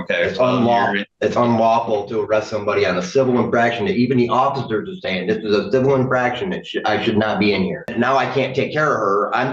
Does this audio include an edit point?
yes; 2 cuts; at 1.1 s, 7.9 s

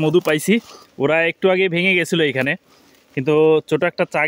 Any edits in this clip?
no; 0 cuts

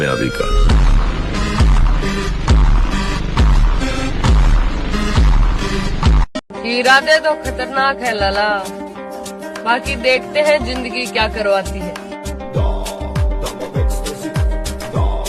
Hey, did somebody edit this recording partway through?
yes; 1 cut; at 6.4 s

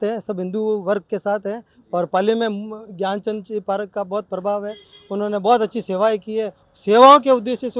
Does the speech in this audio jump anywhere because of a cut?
no; 0 cuts

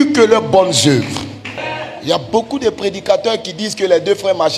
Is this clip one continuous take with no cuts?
no; 1 cut; at 1.6 s

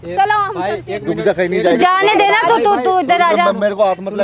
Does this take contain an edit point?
no; 0 cuts

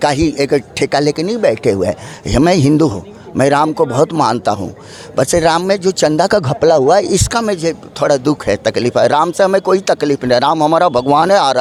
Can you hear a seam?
no; 0 cuts

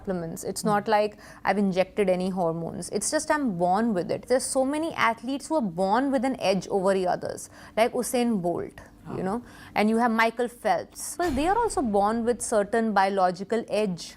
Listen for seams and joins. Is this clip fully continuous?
no; 2 cuts; at 4.2 s, 11.1 s

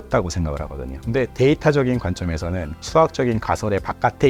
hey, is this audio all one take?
yes; 0 cuts

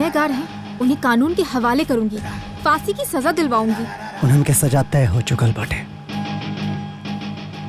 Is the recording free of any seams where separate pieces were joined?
yes; 0 cuts

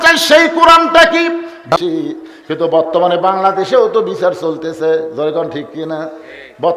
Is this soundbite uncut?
no; 1 cut; at 1.7 s

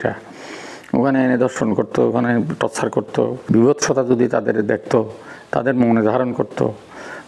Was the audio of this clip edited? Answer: yes; 1 cut; at 3.5 s

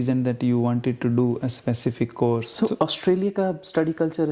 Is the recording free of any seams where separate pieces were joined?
no; 1 cut; at 2.5 s

